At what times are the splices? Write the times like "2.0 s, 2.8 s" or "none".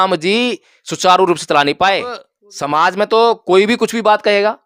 2.2 s